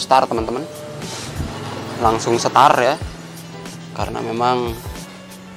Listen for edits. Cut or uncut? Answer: uncut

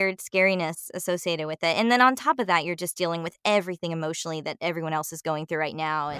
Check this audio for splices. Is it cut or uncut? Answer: uncut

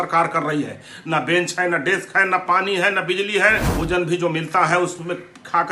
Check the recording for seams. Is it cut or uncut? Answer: cut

